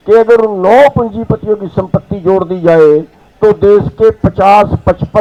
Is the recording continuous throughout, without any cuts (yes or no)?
yes